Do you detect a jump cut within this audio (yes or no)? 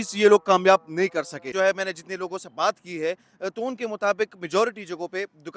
yes